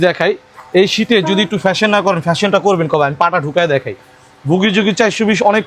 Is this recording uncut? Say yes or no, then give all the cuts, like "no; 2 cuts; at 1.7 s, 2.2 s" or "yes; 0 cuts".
yes; 0 cuts